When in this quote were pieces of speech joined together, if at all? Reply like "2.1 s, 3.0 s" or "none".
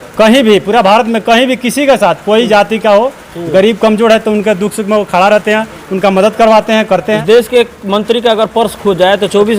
7.2 s